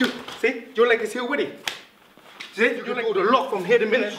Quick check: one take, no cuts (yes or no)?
no